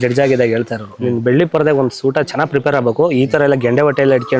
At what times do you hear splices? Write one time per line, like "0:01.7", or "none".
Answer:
none